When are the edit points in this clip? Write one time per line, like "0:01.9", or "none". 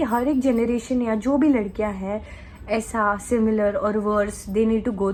none